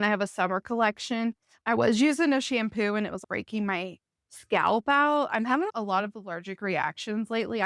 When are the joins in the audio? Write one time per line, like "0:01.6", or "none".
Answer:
0:01.5

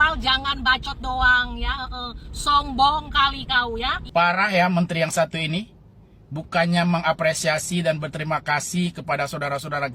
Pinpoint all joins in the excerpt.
0:03.9

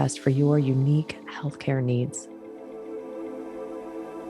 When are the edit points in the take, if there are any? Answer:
0:02.2

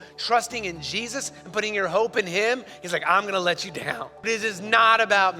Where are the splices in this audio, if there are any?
0:04.3

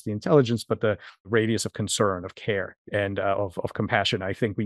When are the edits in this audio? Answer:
0:01.3
0:02.8

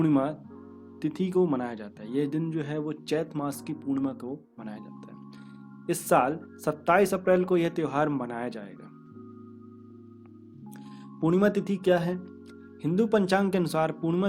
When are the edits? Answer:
0:08.7
0:11.2

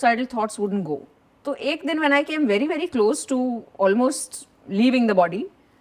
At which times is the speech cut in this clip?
none

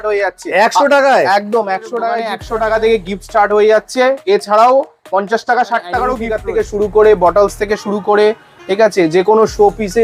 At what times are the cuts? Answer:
0:02.3
0:06.3

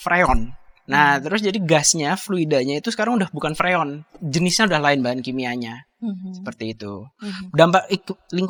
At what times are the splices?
none

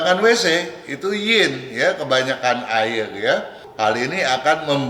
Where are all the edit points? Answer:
0:03.6

